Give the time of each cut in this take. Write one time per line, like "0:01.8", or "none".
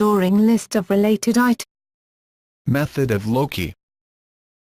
none